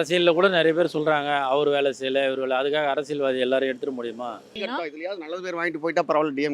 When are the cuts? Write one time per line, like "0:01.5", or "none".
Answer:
0:04.5